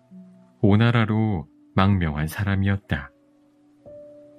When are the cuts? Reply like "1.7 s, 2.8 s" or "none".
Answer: 3.4 s